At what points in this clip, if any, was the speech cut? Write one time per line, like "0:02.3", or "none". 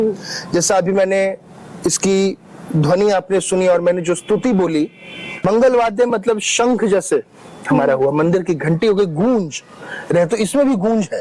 0:05.4

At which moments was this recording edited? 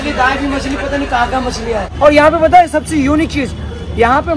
0:01.9

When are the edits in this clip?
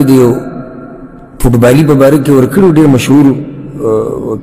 none

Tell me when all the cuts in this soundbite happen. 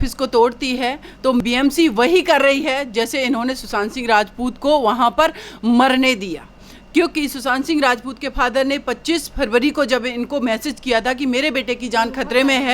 0:01.4

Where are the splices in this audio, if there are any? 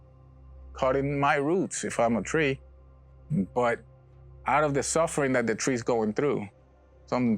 0:03.2

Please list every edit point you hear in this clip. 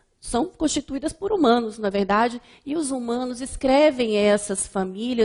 0:02.0

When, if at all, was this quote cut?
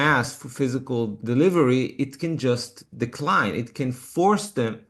0:01.2

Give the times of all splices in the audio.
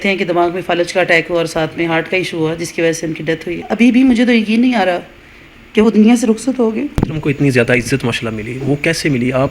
0:03.6
0:06.9

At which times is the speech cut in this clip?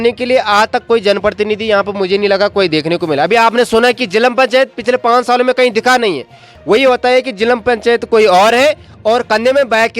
none

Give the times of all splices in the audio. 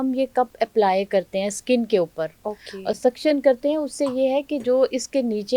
none

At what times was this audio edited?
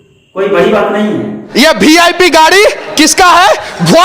0:01.4

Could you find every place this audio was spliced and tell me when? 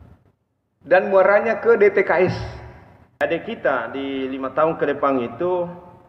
0:03.2

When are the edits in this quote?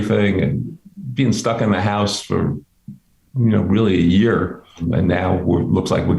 0:04.8

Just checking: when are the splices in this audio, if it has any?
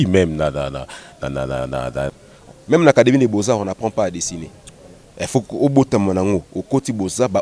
0:02.2

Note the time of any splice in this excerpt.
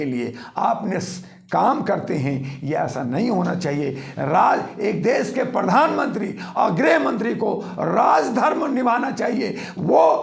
none

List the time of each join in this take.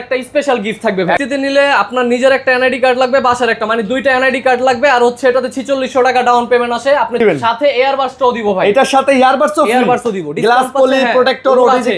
0:01.2
0:07.2

